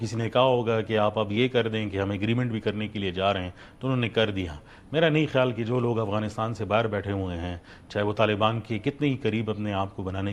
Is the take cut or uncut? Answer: uncut